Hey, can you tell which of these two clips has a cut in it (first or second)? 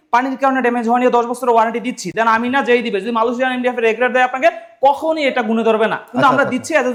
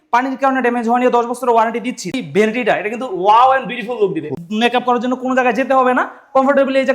second